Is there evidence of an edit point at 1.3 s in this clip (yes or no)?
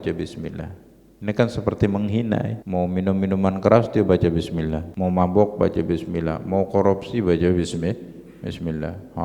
no